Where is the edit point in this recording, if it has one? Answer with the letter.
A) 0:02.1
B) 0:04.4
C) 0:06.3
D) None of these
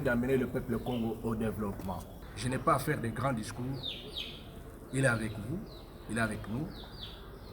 A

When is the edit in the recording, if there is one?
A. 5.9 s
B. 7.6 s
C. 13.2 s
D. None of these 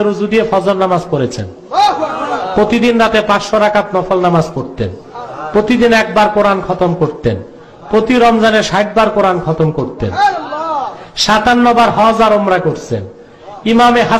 D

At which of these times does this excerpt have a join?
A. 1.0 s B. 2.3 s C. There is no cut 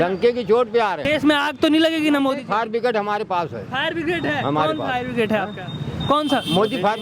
A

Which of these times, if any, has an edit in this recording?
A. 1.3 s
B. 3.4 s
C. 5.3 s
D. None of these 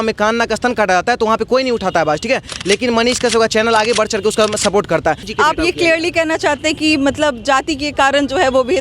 C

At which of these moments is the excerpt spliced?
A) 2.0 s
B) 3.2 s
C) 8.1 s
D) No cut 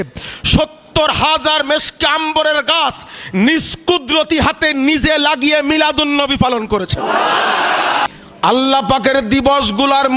C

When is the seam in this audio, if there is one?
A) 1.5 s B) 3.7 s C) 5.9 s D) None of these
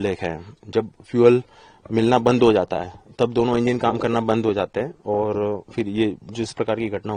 D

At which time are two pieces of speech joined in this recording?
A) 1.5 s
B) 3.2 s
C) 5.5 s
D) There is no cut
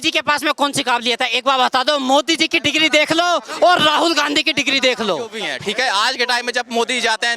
C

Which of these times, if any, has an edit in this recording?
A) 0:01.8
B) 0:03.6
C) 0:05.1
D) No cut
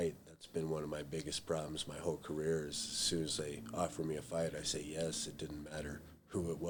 D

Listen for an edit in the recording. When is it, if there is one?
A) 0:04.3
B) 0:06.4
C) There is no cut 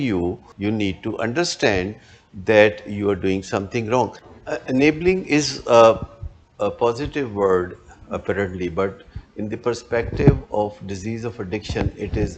A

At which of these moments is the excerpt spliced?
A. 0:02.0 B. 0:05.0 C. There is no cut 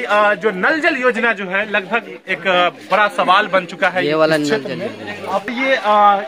B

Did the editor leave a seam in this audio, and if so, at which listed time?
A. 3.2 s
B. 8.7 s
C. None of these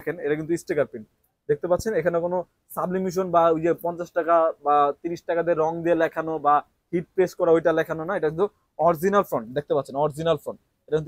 C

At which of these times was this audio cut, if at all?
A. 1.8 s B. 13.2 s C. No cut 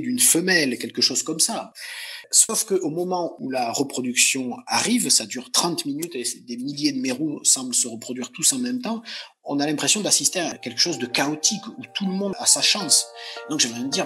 A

